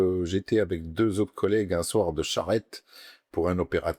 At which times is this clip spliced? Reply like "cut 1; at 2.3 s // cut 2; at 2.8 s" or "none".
none

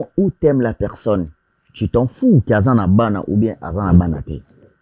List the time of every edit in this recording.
none

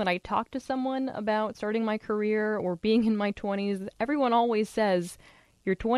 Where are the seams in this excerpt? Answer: none

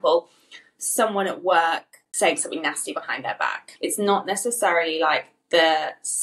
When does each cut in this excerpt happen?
cut 1; at 2.0 s // cut 2; at 3.7 s

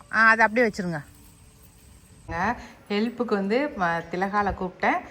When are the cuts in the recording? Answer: cut 1; at 2.3 s

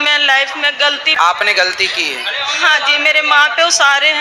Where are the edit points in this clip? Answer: cut 1; at 1.1 s

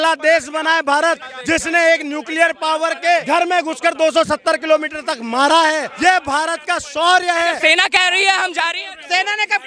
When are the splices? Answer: cut 1; at 1.3 s // cut 2; at 3.2 s // cut 3; at 5.9 s // cut 4; at 7.6 s

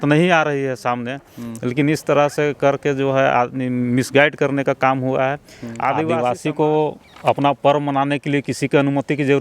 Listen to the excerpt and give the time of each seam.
cut 1; at 6.1 s

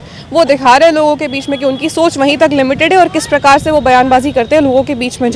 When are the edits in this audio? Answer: none

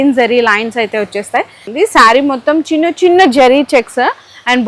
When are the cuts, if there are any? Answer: cut 1; at 1.6 s

